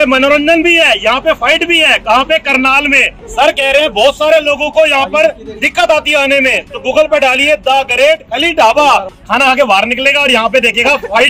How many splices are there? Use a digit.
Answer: 2